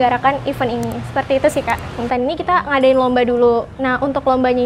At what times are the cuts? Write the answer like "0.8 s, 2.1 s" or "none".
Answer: 2.1 s